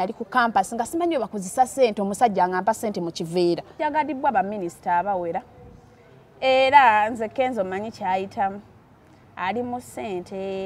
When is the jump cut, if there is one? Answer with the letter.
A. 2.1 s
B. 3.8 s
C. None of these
B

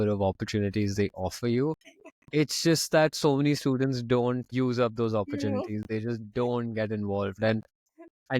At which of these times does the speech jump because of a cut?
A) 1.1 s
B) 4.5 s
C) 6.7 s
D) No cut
B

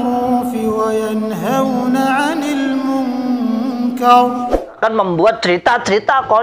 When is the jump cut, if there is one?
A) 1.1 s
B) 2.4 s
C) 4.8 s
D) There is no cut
C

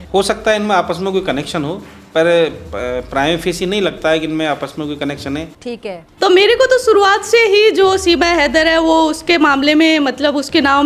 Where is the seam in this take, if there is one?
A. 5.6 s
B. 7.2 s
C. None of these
A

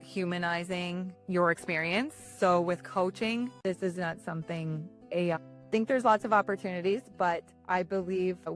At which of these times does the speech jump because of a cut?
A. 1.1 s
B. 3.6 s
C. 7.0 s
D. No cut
B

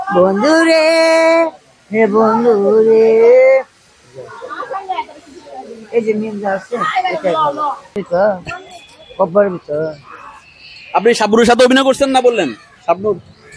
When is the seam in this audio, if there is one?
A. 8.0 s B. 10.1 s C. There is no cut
A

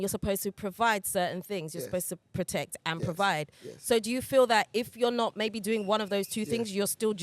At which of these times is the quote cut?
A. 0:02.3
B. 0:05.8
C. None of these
A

